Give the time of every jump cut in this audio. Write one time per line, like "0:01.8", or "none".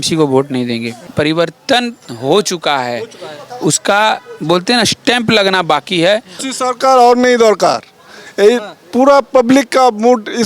0:01.0
0:06.4